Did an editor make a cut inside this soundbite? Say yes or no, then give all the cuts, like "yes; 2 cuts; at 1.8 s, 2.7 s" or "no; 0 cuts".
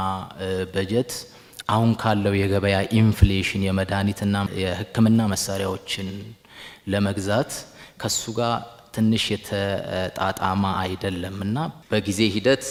no; 0 cuts